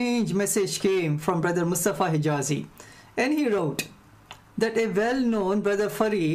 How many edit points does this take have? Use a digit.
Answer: 2